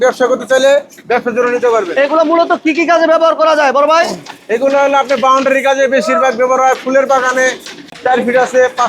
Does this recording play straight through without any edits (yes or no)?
no